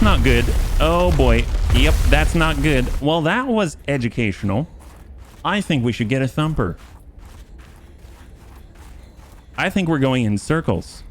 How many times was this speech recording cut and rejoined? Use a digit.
2